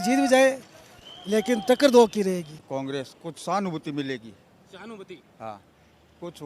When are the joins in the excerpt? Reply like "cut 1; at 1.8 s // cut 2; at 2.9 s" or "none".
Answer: cut 1; at 2.6 s